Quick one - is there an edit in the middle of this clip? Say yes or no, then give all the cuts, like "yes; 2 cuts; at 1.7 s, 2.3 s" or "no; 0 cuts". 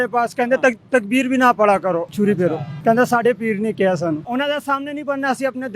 yes; 2 cuts; at 2.2 s, 4.2 s